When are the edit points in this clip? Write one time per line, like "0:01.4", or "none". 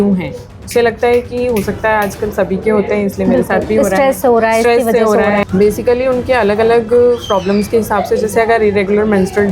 0:05.4

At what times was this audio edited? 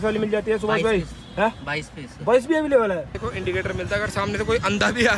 0:03.2

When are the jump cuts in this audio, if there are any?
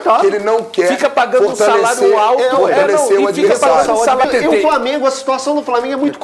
0:04.3

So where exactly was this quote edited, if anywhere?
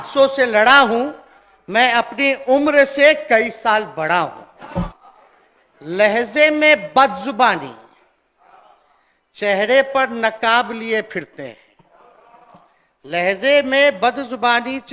0:04.9

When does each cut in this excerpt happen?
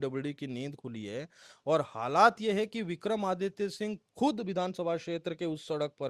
none

